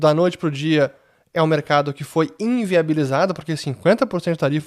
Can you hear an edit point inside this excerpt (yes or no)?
no